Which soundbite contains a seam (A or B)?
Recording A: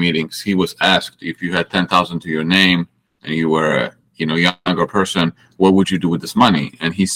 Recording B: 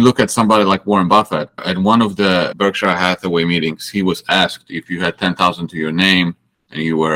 B